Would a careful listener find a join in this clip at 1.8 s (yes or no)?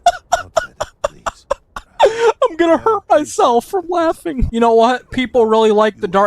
yes